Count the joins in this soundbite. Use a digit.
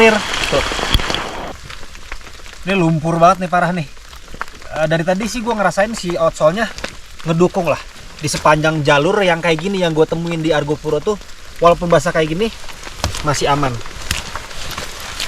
1